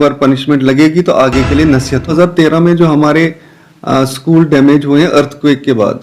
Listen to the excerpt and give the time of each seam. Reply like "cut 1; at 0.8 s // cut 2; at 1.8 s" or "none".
cut 1; at 2.1 s